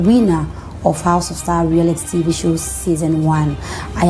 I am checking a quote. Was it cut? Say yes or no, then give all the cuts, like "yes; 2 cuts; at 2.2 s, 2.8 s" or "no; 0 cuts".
no; 0 cuts